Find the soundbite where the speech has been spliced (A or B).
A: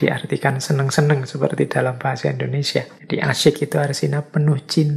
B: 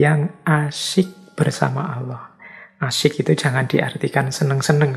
A